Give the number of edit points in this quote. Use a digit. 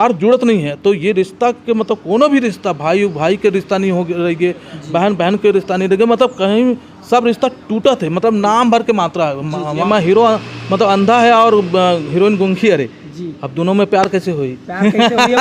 1